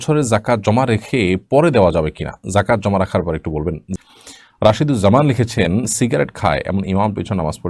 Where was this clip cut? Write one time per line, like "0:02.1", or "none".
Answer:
0:04.0